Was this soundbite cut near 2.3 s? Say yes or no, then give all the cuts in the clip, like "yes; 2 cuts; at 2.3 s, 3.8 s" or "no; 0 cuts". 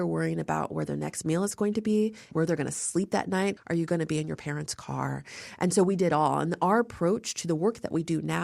yes; 2 cuts; at 2.3 s, 3.6 s